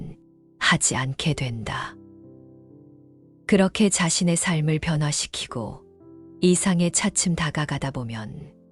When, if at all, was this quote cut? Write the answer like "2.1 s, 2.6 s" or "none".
1.9 s, 3.4 s